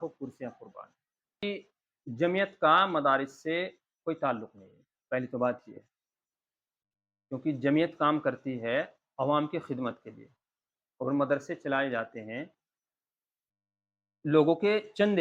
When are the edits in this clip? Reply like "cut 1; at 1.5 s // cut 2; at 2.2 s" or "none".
cut 1; at 1.4 s